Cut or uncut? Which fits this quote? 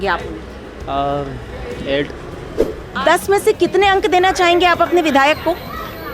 cut